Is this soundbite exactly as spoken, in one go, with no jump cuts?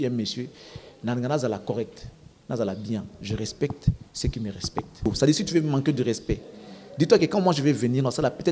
no; 1 cut; at 5.1 s

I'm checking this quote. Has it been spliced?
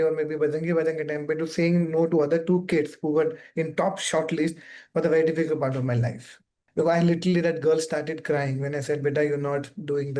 no; 0 cuts

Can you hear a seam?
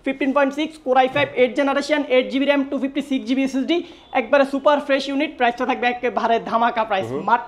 no; 0 cuts

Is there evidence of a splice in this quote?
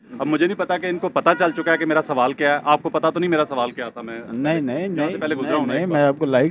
no; 0 cuts

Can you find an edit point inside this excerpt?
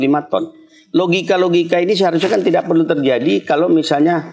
no; 0 cuts

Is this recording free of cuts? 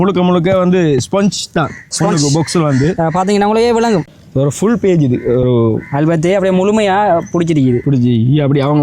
no; 1 cut; at 4.1 s

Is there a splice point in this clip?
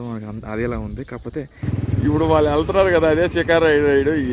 yes; 1 cut; at 1.6 s

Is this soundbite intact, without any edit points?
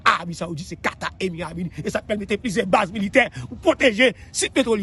yes; 0 cuts

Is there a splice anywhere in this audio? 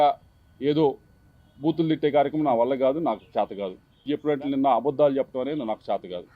yes; 1 cut; at 4.1 s

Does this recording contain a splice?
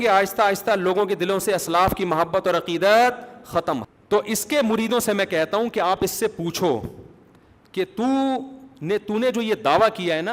yes; 1 cut; at 3.8 s

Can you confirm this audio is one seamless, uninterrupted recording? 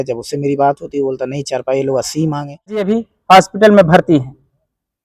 no; 1 cut; at 2.9 s

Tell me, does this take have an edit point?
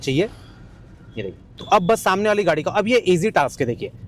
yes; 1 cut; at 1.5 s

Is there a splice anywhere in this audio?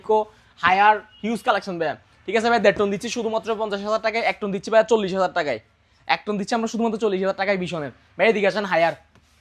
no; 0 cuts

